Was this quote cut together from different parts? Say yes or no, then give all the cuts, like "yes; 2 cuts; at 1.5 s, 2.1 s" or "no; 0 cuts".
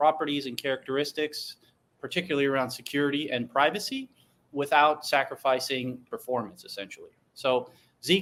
no; 0 cuts